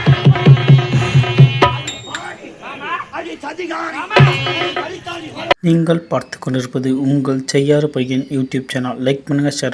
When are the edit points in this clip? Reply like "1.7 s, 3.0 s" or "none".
5.5 s